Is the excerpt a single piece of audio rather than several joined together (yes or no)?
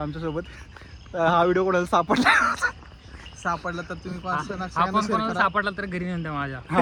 yes